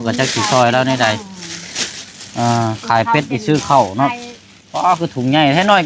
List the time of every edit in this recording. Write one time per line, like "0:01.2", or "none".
none